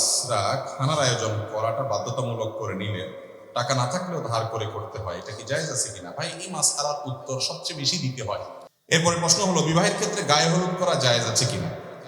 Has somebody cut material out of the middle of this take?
yes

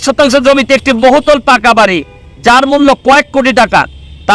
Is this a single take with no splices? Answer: yes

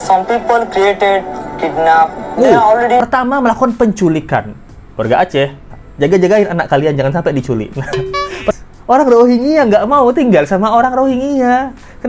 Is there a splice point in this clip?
yes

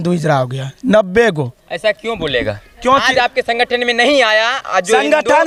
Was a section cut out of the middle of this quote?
no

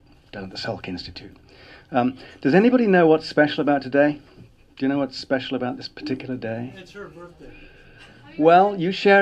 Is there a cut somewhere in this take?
yes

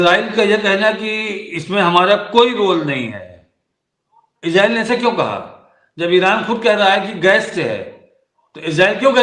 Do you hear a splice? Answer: no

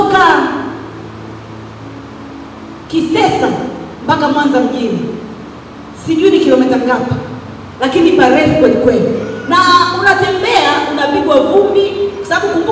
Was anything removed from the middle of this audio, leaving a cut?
no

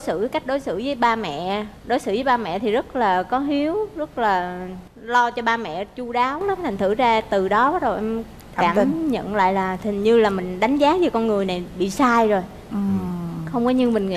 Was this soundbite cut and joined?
no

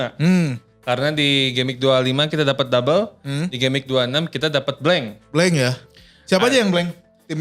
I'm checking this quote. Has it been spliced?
no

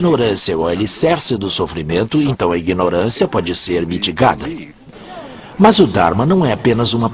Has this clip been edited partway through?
no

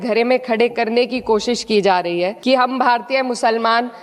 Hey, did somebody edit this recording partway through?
yes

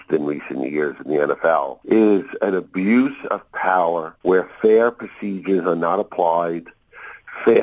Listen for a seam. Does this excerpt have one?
yes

